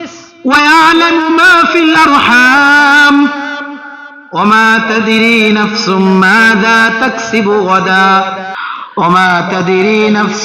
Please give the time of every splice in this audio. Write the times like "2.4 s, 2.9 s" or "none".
8.5 s

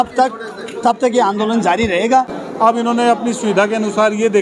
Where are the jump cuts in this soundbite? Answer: 2.3 s

